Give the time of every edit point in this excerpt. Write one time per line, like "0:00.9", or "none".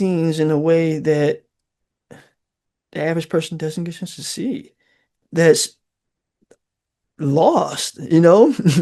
0:05.2